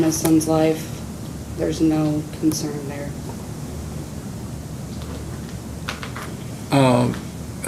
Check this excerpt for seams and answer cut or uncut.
uncut